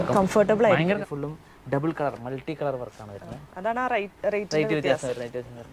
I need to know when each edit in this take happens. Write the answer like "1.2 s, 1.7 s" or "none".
1.0 s